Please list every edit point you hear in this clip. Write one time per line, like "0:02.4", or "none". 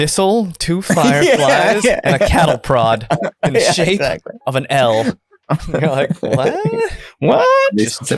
none